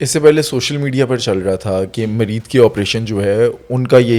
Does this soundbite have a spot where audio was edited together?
no; 0 cuts

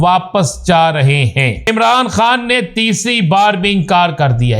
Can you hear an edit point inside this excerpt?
yes; 1 cut; at 1.7 s

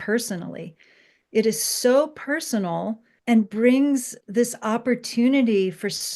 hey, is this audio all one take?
no; 2 cuts; at 3.1 s, 4.2 s

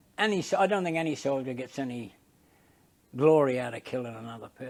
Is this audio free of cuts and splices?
yes; 0 cuts

